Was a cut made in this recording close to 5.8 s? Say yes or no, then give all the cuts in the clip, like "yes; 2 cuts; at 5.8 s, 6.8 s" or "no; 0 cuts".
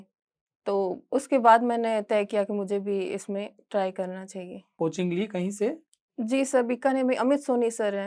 no; 1 cut; at 4.6 s